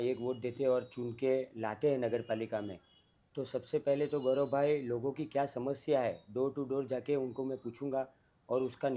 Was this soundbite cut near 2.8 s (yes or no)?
no